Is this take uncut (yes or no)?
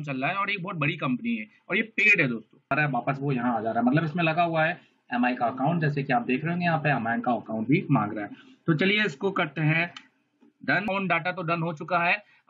no